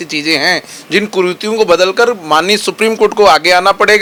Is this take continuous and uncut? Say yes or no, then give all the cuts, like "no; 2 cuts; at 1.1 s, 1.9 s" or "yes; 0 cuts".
yes; 0 cuts